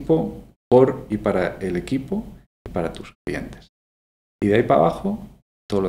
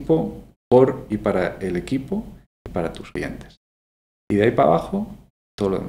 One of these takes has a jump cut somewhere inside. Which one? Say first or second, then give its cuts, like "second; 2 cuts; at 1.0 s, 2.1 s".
second; 1 cut; at 3.0 s